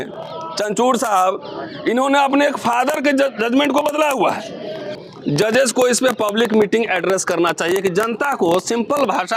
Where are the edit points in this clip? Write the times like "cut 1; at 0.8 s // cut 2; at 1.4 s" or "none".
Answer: cut 1; at 4.9 s